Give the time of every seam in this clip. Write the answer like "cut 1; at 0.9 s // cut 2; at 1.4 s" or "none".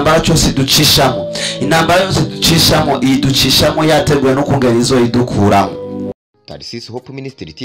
cut 1; at 6.1 s